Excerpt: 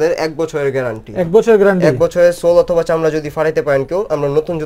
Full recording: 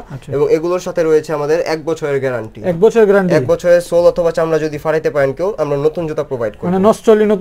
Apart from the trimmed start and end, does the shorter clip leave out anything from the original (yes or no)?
no